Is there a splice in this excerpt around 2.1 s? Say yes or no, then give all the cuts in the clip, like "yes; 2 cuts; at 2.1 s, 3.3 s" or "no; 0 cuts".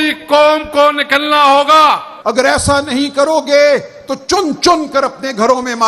yes; 1 cut; at 2.1 s